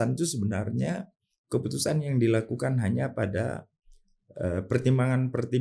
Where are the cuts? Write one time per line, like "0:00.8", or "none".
none

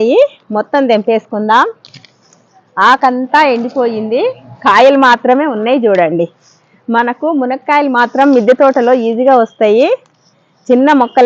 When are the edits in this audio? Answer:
none

